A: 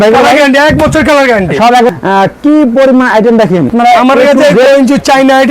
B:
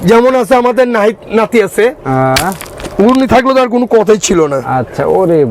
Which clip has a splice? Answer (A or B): A